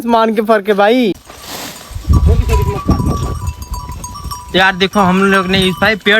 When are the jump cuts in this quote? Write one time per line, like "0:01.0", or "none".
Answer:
0:01.3